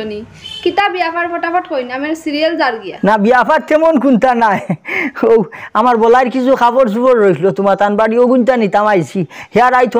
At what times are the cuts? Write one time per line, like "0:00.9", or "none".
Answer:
none